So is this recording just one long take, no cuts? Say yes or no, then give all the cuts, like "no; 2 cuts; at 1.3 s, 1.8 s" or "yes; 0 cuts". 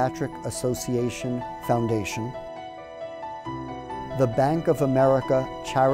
no; 2 cuts; at 2.1 s, 4.1 s